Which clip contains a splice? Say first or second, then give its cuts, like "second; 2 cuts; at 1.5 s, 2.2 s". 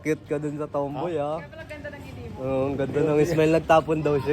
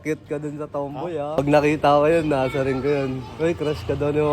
second; 1 cut; at 1.4 s